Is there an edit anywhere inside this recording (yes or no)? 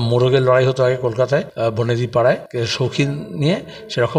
yes